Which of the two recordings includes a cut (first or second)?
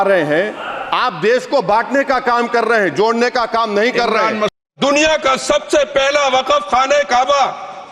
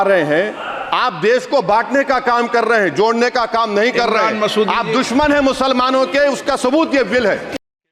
first